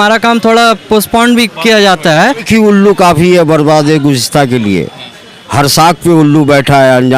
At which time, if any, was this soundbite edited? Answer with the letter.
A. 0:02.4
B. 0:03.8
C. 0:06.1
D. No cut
A